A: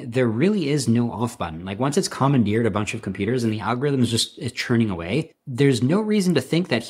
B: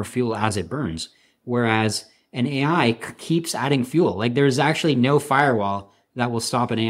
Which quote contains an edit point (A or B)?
A